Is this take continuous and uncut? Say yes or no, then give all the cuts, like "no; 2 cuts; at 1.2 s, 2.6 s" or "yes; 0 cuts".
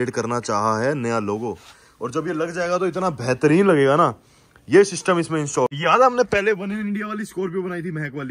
no; 1 cut; at 5.7 s